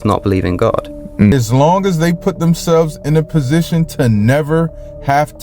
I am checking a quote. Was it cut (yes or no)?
yes